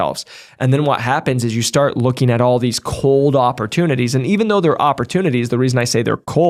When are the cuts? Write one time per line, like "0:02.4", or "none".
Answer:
none